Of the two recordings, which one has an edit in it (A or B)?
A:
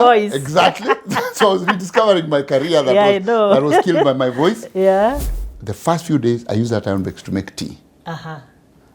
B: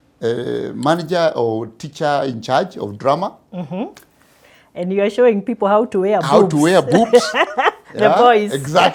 A